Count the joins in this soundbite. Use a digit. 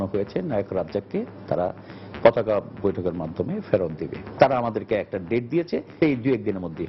1